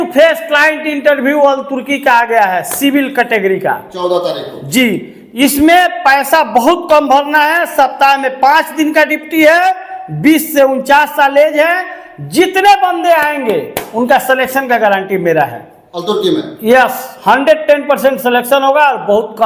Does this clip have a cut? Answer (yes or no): no